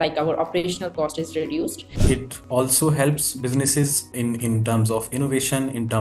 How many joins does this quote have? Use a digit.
2